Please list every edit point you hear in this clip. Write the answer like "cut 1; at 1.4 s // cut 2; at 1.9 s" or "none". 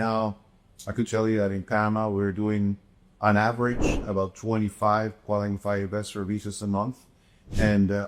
none